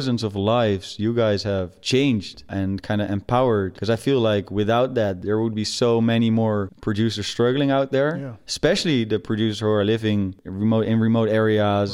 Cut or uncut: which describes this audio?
cut